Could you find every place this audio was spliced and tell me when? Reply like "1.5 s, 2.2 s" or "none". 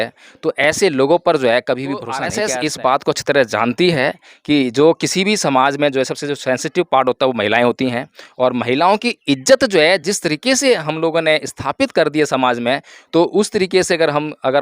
2.3 s